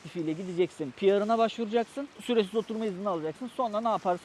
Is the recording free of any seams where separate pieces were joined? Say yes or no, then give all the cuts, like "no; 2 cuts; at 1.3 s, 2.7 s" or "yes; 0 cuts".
no; 1 cut; at 2.0 s